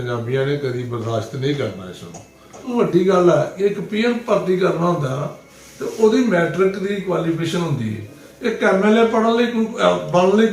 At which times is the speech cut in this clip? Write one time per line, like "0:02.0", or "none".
0:02.6